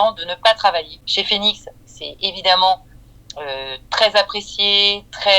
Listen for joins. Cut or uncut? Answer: cut